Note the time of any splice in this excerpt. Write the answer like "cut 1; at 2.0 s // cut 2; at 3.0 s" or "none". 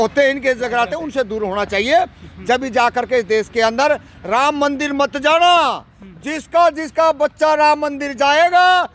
none